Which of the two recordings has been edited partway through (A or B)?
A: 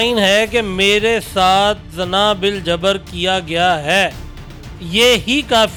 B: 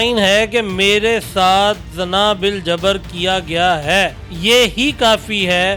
B